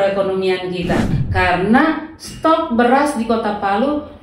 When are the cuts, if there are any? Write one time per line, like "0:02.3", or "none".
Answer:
0:01.2